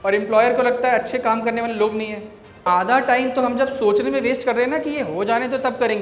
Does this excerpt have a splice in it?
yes; 1 cut; at 2.6 s

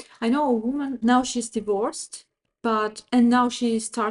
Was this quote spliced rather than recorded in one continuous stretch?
yes; 1 cut; at 1.0 s

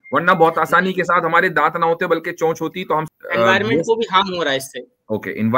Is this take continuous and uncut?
no; 1 cut; at 3.1 s

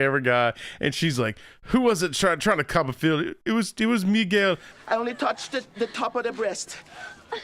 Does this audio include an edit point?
no; 0 cuts

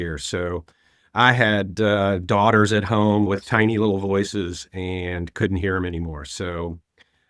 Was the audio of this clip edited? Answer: yes; 1 cut; at 3.3 s

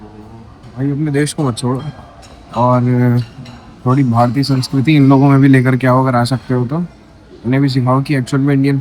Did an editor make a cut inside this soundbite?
no; 0 cuts

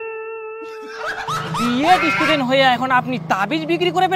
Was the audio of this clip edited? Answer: yes; 1 cut; at 1.0 s

